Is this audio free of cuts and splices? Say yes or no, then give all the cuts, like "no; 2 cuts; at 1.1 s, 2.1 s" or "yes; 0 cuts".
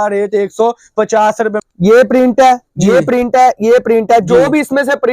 no; 1 cut; at 1.6 s